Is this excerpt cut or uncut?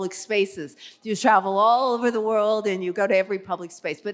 uncut